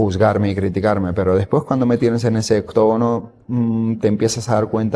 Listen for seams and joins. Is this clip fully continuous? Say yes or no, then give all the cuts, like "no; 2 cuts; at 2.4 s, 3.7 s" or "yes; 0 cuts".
yes; 0 cuts